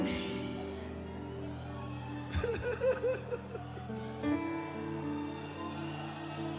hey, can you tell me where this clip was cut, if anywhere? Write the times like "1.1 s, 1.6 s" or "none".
none

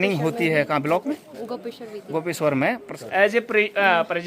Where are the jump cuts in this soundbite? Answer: 2.9 s

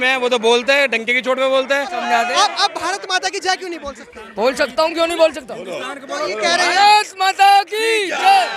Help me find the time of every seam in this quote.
2.0 s

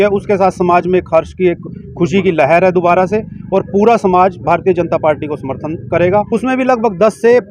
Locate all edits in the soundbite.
6.3 s

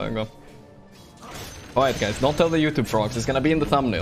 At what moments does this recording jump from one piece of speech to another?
1.3 s

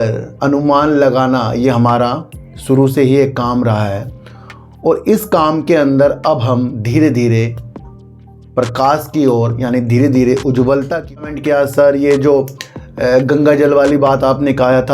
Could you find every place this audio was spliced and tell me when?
11.1 s

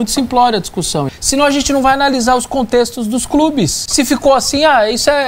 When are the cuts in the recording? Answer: 1.1 s, 3.8 s

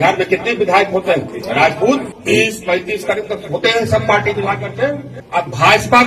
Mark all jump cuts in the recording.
1.3 s, 2.1 s, 5.1 s

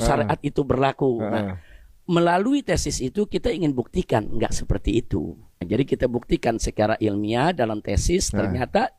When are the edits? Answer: 5.5 s

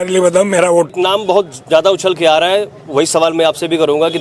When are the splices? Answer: 0.9 s

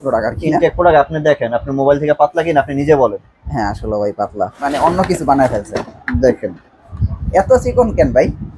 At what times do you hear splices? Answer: 4.6 s

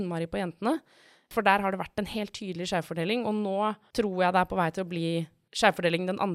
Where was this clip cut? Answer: 1.3 s, 3.8 s, 5.4 s

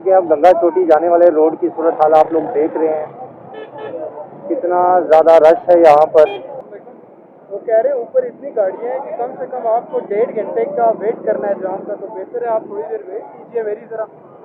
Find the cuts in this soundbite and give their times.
none

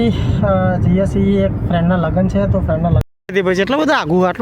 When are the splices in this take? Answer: 3.0 s

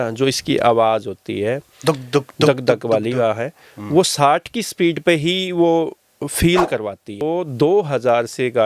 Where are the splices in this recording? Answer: 7.2 s

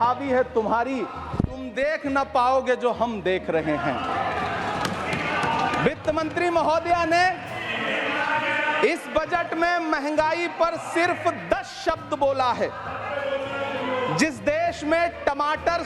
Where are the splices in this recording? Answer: none

